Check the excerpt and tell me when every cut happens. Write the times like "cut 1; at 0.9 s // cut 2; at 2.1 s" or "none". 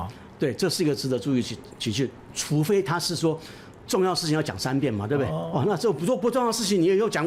none